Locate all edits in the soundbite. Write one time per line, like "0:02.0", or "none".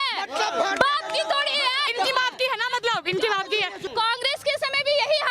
0:01.9
0:03.8